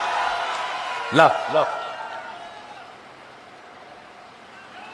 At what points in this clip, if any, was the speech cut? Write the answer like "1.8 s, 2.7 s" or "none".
none

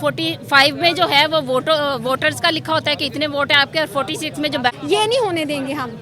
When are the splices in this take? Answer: 4.7 s

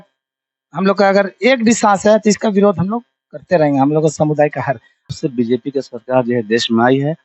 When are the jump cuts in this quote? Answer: 5.1 s

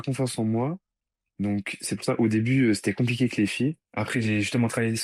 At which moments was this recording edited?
3.8 s

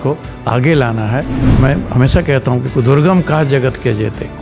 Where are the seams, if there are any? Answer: 1.4 s

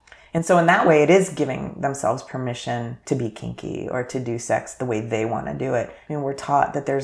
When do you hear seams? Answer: 3.0 s, 6.0 s

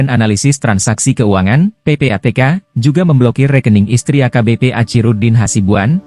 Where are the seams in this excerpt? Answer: none

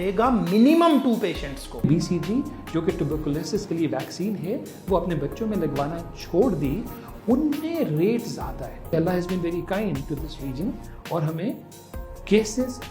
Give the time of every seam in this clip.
1.8 s, 8.8 s

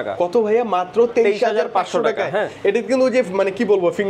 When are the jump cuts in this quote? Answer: none

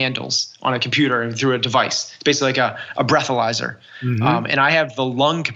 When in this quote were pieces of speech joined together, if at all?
none

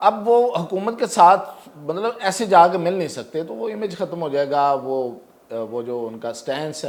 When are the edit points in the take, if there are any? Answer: none

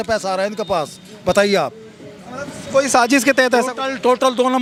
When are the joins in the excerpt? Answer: none

